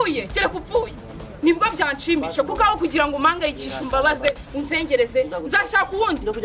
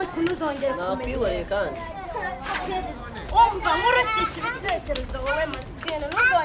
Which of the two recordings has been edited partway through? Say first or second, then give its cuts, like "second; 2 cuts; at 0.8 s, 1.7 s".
first; 1 cut; at 0.9 s